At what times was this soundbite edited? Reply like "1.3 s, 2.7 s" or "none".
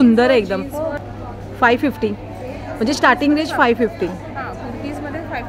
1.0 s